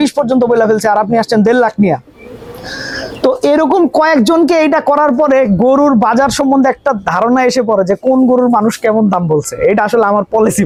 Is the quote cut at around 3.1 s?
no; 0 cuts

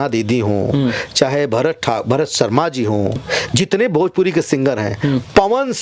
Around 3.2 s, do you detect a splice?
yes; 1 cut; at 3.2 s

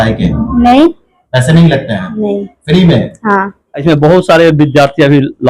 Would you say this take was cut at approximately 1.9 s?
no; 1 cut; at 3.8 s

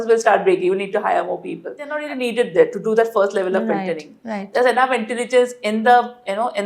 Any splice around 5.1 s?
no; 1 cut; at 2.0 s

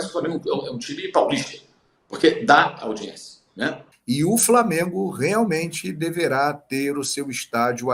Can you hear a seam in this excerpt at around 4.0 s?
yes; 1 cut; at 4.0 s

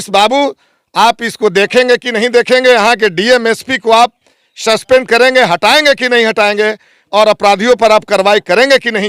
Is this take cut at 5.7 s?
no; 0 cuts

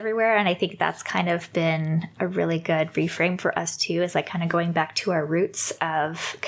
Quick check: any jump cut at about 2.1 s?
yes; 1 cut; at 2.1 s

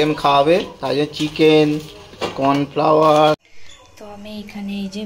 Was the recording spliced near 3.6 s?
yes; 1 cut; at 3.6 s

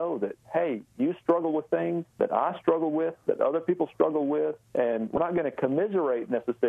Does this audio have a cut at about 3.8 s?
no; 2 cuts; at 2.1 s, 5.0 s

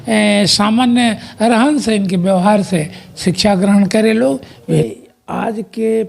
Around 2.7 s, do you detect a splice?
no; 1 cut; at 4.9 s

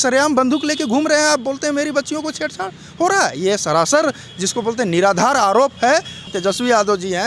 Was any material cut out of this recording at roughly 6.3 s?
yes; 1 cut; at 6.3 s

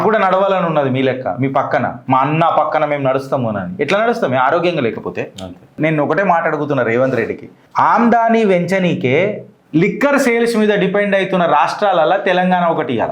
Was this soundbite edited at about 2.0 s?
no; 1 cut; at 5.8 s

